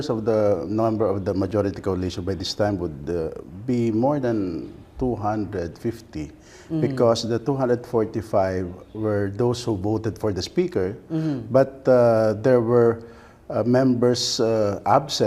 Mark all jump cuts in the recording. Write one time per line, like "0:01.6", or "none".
0:08.6